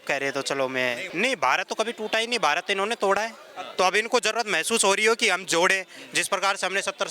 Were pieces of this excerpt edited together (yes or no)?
yes